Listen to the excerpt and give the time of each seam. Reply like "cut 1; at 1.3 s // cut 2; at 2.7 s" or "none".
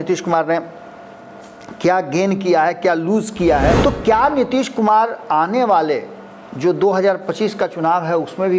cut 1; at 3.8 s